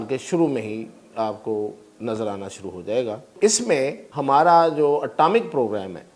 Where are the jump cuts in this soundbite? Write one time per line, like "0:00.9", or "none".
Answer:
0:03.3
0:04.1